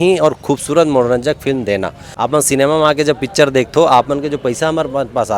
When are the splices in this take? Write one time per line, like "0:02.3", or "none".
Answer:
0:02.0